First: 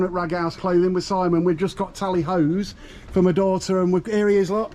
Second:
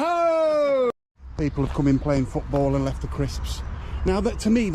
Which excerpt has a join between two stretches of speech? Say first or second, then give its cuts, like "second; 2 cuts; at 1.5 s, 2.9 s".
second; 1 cut; at 0.9 s